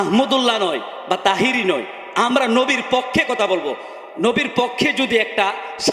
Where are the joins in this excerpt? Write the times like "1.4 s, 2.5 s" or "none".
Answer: none